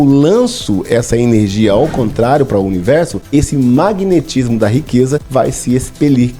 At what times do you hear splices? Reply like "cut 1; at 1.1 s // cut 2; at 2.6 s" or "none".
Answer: cut 1; at 3.2 s // cut 2; at 5.3 s